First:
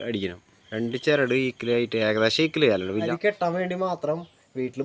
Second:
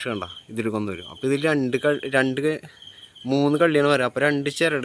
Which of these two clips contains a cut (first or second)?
first